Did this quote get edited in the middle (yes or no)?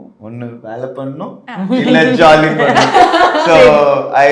no